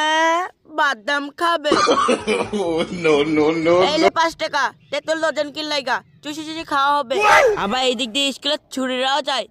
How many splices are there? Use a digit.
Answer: 0